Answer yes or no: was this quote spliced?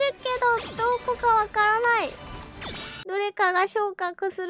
no